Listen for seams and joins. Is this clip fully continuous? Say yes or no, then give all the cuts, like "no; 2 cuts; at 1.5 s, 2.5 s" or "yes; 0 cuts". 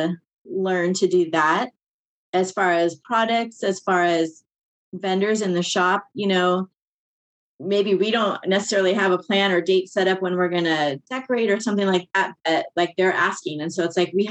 yes; 0 cuts